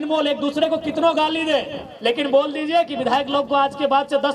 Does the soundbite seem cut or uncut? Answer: uncut